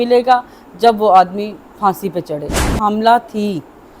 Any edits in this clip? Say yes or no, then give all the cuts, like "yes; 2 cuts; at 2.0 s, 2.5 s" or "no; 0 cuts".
yes; 1 cut; at 2.8 s